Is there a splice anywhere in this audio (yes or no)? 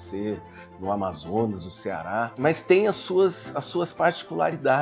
yes